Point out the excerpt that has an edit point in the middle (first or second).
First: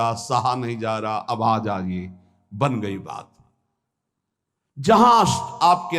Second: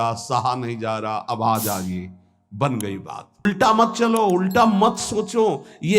second